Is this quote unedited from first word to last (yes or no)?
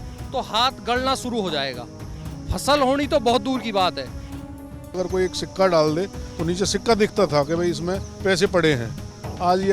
no